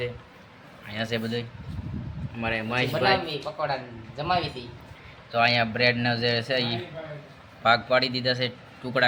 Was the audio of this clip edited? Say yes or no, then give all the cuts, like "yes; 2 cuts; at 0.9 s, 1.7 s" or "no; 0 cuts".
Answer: no; 0 cuts